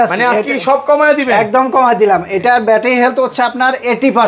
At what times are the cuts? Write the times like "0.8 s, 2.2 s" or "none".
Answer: none